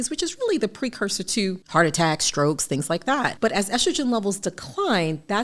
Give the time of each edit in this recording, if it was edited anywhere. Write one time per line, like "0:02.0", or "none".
0:01.6
0:03.3